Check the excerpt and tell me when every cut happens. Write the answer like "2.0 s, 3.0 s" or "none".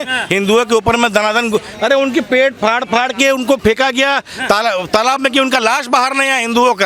none